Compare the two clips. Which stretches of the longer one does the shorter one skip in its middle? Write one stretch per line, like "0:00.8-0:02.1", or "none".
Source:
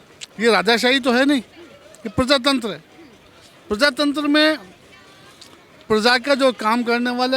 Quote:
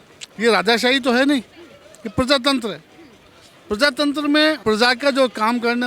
0:04.6-0:05.8